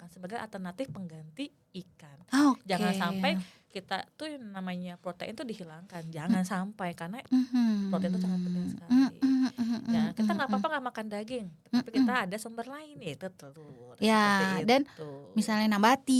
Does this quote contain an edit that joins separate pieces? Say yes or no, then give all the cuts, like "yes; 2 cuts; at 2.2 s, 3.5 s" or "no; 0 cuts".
no; 0 cuts